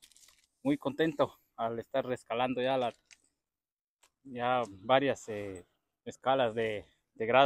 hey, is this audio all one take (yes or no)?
yes